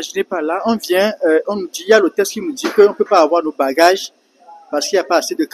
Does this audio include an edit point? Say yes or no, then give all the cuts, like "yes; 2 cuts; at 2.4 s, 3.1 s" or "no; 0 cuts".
no; 0 cuts